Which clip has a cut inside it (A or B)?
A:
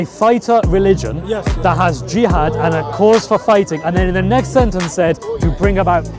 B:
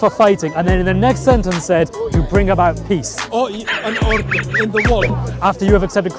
B